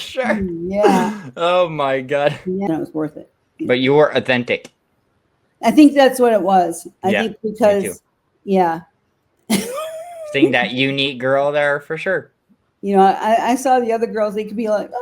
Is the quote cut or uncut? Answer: cut